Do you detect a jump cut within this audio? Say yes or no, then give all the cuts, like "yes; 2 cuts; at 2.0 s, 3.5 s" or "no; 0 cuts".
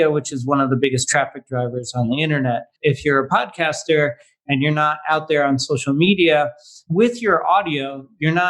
yes; 2 cuts; at 2.7 s, 6.8 s